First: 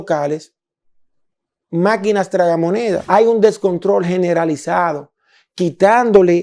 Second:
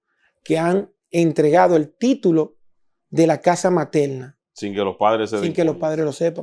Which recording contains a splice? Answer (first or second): first